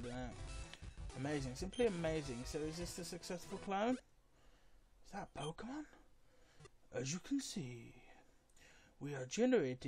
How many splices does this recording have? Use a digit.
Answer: 1